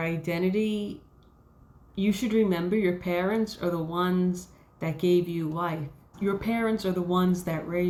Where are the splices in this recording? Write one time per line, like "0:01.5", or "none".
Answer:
none